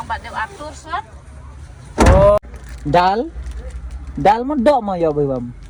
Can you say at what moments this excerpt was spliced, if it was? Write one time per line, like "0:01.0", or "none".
0:02.4